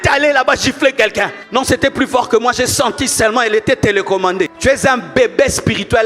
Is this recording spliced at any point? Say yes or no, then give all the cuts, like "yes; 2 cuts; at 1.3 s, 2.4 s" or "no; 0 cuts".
yes; 2 cuts; at 1.4 s, 4.5 s